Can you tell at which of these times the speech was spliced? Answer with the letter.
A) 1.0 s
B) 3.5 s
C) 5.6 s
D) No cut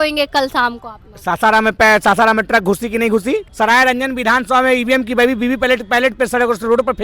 B